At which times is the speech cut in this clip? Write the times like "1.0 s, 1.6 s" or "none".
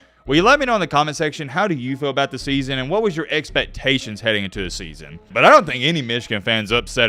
5.2 s